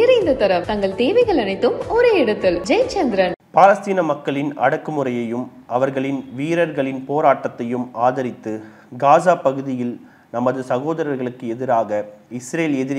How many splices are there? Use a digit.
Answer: 1